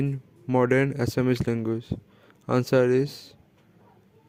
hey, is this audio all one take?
yes; 0 cuts

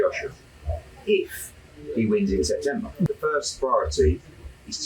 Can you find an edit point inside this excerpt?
yes; 1 cut; at 3.1 s

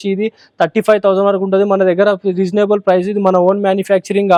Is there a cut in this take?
no; 0 cuts

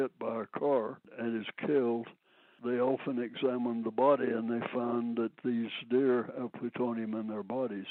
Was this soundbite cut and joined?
no; 0 cuts

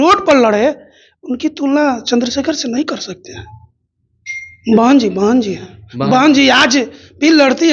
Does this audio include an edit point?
no; 0 cuts

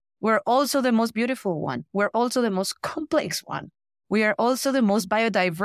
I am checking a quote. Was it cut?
no; 0 cuts

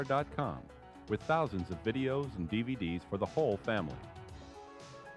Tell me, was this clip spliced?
yes; 1 cut; at 4.0 s

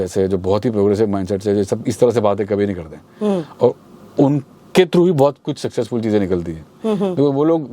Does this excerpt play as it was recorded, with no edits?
yes; 0 cuts

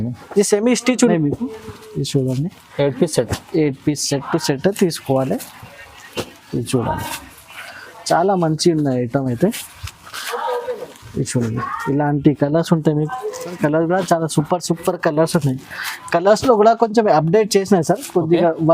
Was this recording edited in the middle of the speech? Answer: yes; 2 cuts; at 1.0 s, 13.5 s

